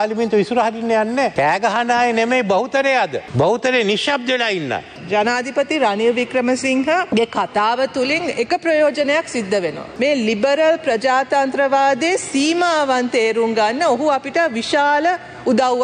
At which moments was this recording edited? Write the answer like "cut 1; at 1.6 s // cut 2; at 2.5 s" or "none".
cut 1; at 1.3 s // cut 2; at 3.2 s // cut 3; at 5.0 s // cut 4; at 7.1 s // cut 5; at 9.8 s